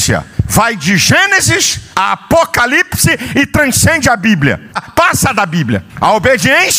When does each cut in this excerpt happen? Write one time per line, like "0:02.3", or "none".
0:04.8